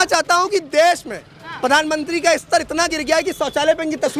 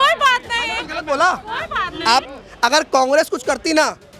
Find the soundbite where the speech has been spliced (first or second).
second